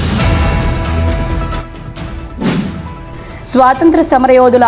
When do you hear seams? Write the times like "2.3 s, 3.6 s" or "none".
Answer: 1.3 s, 2.8 s

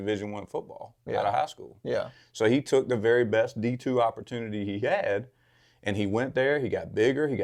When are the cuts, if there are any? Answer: none

